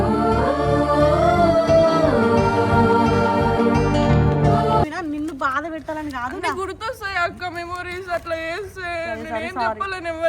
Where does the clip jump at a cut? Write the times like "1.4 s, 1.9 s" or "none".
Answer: 4.9 s